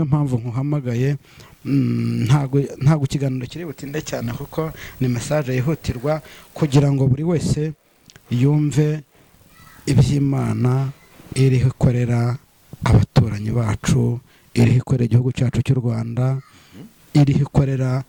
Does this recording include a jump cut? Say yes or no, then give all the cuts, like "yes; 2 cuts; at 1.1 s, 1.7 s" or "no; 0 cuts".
no; 0 cuts